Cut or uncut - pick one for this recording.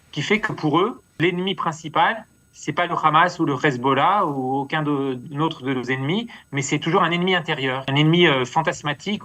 cut